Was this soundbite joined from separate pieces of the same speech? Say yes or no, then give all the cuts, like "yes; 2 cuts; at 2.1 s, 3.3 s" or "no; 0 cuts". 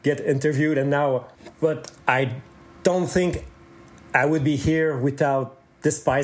yes; 1 cut; at 1.4 s